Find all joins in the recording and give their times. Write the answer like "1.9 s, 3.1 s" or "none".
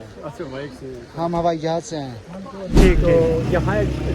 2.7 s